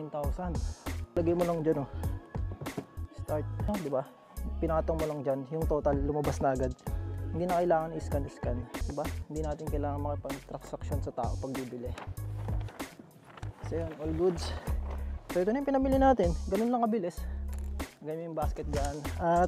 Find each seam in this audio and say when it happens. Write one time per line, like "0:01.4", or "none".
0:01.2
0:03.7
0:08.8